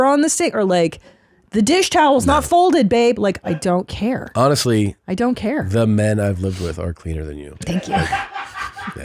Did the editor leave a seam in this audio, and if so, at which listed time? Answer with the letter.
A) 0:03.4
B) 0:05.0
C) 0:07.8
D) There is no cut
A